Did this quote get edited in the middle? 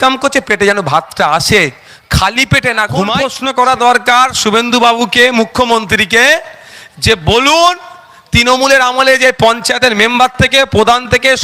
yes; 1 cut; at 3.3 s

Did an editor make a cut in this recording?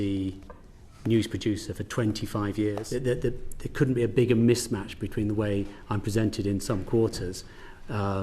yes; 1 cut; at 2.8 s

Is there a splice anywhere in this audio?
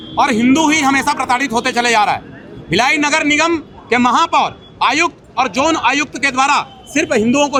no; 0 cuts

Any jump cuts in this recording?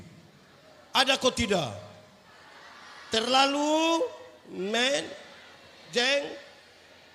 no; 0 cuts

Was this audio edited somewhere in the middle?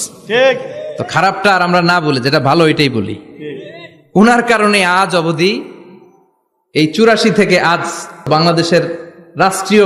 yes; 1 cut; at 8.3 s

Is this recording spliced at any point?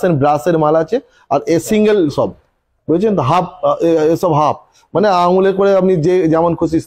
no; 0 cuts

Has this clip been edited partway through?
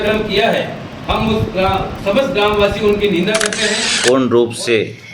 yes; 1 cut; at 3.8 s

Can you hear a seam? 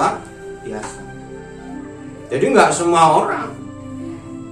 no; 0 cuts

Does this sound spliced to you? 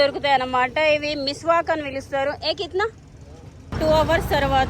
yes; 1 cut; at 3.6 s

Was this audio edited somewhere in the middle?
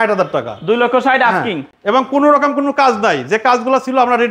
no; 0 cuts

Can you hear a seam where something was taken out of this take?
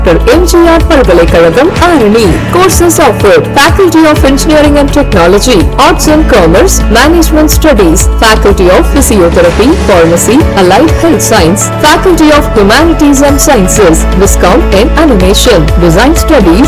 no; 0 cuts

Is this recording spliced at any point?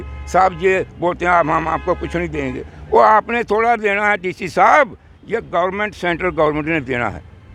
no; 0 cuts

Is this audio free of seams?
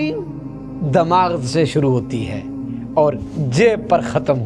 yes; 0 cuts

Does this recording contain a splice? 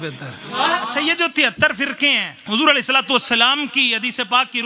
yes; 2 cuts; at 0.9 s, 2.3 s

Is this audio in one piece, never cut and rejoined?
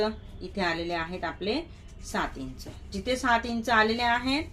yes; 0 cuts

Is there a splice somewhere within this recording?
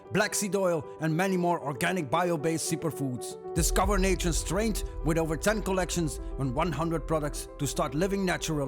no; 0 cuts

